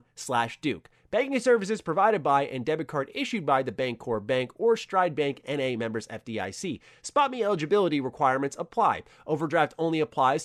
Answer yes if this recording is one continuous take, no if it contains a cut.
yes